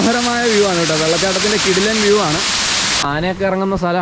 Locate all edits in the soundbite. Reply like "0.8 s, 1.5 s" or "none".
3.0 s